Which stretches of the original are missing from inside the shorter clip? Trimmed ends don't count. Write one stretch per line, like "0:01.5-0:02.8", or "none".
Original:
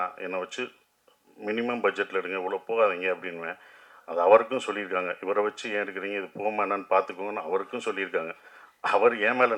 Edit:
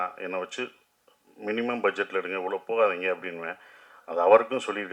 none